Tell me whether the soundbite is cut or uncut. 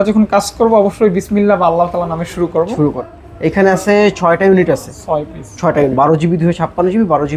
cut